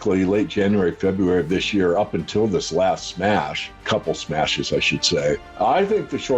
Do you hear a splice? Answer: yes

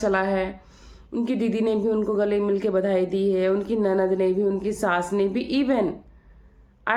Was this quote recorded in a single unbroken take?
yes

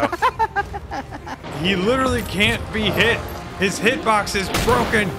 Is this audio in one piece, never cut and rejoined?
no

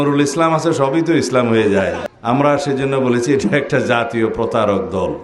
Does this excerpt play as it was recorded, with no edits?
no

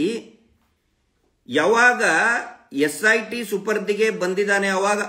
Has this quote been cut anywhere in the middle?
no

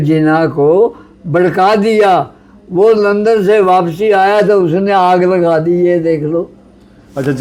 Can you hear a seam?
no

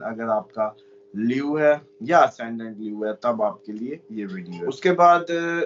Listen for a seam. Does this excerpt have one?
yes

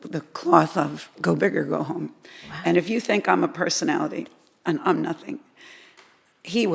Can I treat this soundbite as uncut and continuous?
yes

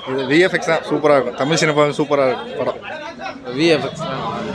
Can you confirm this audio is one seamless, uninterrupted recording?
yes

